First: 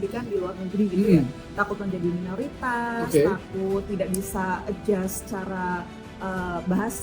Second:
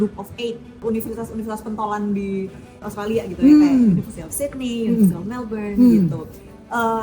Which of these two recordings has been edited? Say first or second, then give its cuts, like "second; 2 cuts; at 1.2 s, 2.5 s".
second; 2 cuts; at 0.8 s, 2.8 s